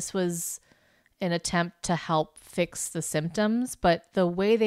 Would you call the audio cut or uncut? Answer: uncut